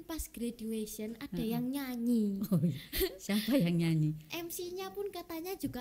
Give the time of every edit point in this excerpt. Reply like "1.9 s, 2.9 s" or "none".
none

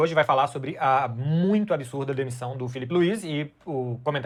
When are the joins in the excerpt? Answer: none

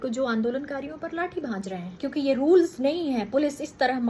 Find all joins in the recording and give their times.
1.9 s

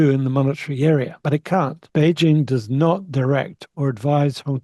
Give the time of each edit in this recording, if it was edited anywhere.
1.1 s

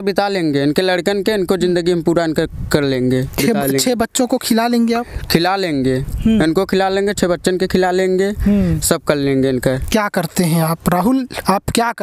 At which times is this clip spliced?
none

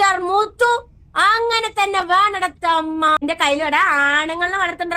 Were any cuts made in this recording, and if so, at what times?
3.2 s

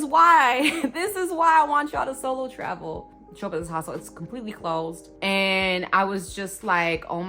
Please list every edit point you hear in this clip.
3.1 s

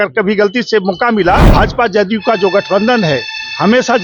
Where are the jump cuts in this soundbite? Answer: 1.5 s

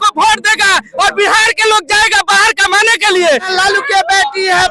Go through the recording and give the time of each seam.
3.5 s

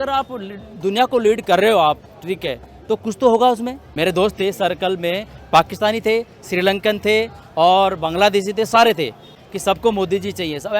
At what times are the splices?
3.8 s, 9.4 s

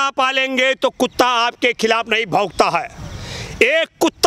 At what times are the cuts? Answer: none

